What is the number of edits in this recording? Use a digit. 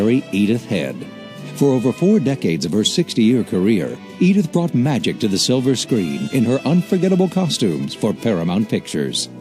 1